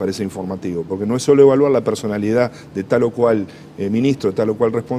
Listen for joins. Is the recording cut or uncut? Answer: uncut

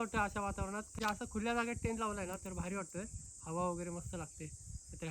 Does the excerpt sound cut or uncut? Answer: cut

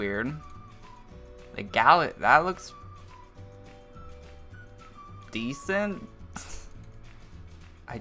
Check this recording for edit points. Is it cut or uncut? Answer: uncut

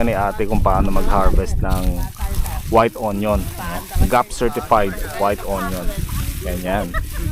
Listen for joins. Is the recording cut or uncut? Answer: uncut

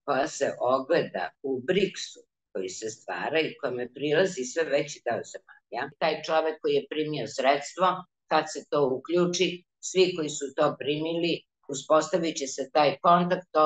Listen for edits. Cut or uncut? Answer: cut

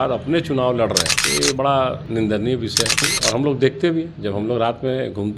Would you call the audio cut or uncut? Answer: cut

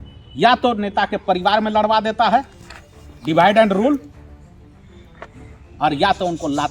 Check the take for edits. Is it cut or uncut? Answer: uncut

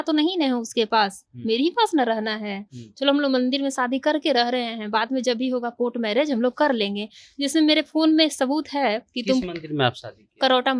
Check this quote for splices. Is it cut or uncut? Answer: uncut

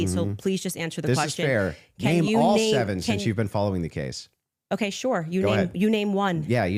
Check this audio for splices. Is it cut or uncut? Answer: uncut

